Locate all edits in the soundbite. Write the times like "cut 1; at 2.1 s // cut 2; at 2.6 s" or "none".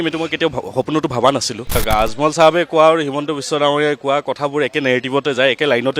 cut 1; at 1.8 s